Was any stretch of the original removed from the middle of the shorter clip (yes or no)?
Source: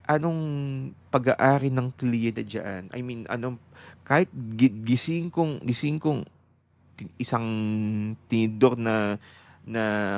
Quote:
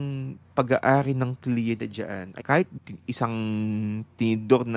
yes